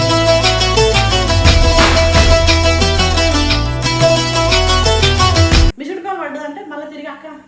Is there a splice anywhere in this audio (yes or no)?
yes